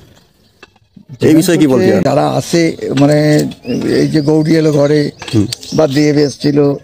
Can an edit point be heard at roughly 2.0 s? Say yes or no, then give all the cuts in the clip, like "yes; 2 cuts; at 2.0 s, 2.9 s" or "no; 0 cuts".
yes; 1 cut; at 2.0 s